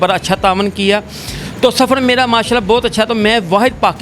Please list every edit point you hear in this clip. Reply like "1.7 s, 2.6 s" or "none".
none